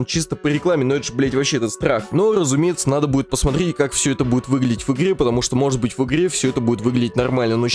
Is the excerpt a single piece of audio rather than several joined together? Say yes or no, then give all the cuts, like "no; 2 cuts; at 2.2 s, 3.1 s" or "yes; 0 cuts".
yes; 0 cuts